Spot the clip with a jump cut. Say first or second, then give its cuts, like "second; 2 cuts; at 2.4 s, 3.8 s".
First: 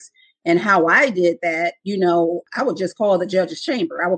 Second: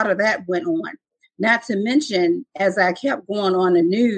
first; 1 cut; at 2.4 s